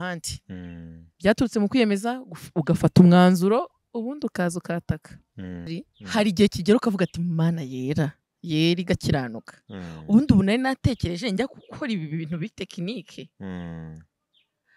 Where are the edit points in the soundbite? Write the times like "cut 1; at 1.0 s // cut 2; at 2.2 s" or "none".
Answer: cut 1; at 5.7 s